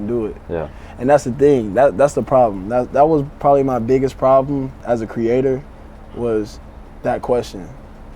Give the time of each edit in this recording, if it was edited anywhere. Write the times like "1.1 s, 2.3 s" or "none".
4.7 s